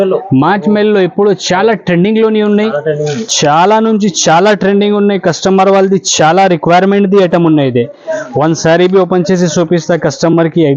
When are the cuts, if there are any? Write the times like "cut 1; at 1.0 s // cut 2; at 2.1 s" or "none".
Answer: none